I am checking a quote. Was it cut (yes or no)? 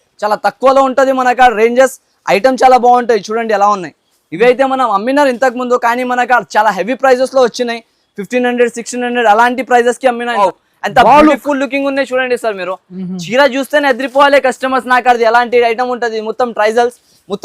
yes